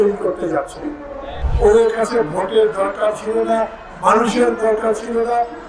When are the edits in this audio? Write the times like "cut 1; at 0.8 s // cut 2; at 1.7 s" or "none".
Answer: cut 1; at 1.4 s